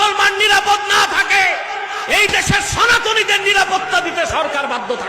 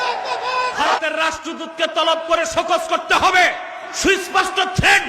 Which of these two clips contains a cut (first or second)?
second